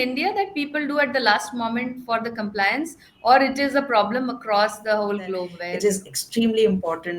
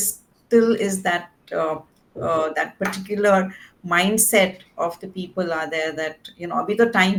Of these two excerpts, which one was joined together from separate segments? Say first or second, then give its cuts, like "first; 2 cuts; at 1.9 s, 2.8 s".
first; 1 cut; at 5.5 s